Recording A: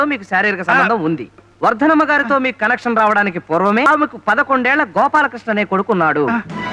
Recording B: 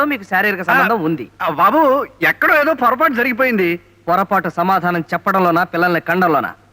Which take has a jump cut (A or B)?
A